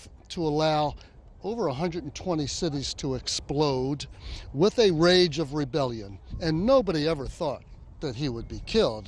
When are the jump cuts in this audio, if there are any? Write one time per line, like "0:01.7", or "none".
0:01.2